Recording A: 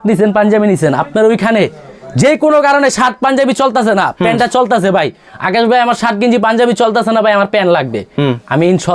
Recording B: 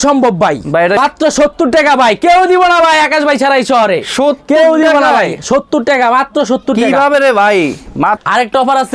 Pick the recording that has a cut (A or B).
B